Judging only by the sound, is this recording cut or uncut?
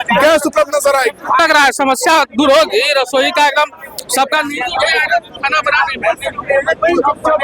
cut